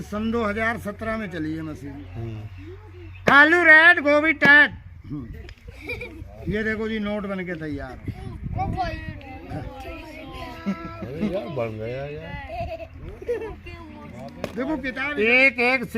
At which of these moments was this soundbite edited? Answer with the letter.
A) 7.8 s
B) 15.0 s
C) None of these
B